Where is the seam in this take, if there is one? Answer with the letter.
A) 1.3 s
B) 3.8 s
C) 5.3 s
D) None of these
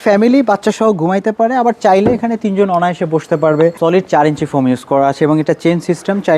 B